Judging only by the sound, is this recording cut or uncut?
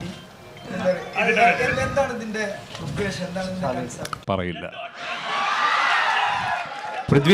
uncut